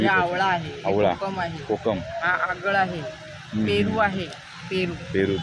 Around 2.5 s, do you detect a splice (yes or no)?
no